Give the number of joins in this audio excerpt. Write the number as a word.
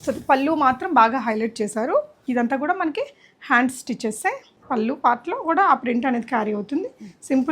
two